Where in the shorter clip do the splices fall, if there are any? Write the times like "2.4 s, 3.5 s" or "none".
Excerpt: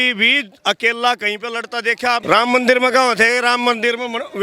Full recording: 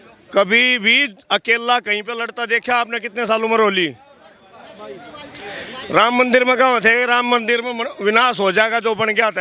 2.2 s